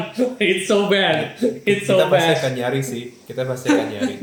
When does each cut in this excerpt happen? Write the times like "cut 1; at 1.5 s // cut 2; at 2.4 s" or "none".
none